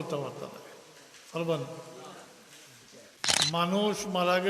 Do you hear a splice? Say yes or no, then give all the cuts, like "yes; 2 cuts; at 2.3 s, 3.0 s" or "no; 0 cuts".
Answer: yes; 1 cut; at 3.1 s